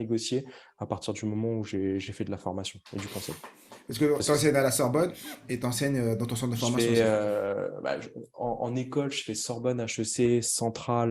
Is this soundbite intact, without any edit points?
yes; 0 cuts

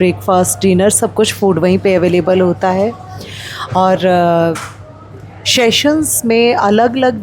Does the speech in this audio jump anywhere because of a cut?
no; 0 cuts

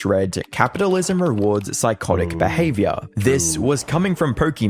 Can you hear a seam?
no; 0 cuts

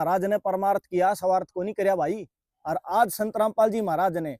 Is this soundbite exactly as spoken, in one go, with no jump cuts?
yes; 0 cuts

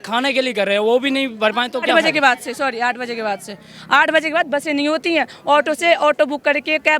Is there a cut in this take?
yes; 1 cut; at 1.9 s

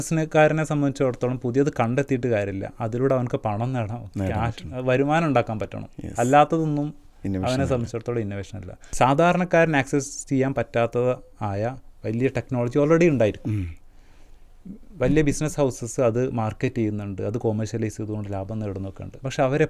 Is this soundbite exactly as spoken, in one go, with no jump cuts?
no; 1 cut; at 8.8 s

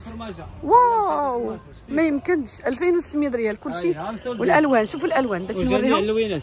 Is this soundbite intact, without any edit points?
yes; 0 cuts

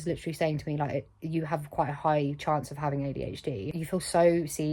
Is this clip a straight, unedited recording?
no; 1 cut; at 3.8 s

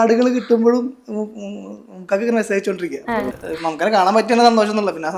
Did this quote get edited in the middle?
yes; 1 cut; at 3.3 s

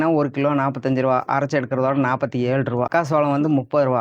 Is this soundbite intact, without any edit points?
no; 1 cut; at 2.9 s

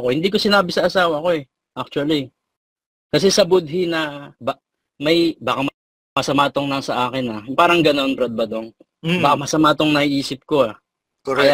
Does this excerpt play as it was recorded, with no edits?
yes; 0 cuts

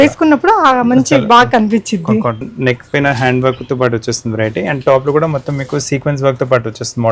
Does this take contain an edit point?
yes; 1 cut; at 2.4 s

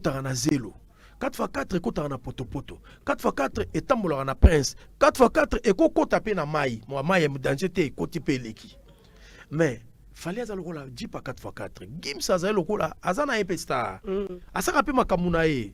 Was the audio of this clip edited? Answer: no; 0 cuts

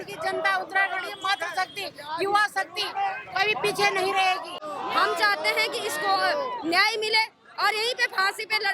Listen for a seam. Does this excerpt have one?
yes; 1 cut; at 4.5 s

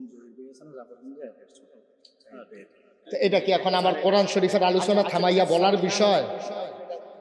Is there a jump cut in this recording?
no; 0 cuts

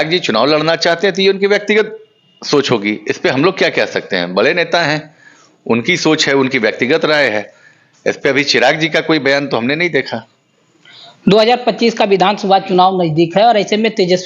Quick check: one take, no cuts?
yes; 0 cuts

